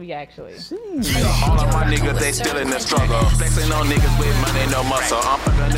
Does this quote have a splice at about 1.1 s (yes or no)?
yes